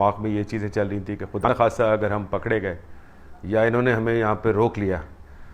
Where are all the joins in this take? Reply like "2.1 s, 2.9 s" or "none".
1.4 s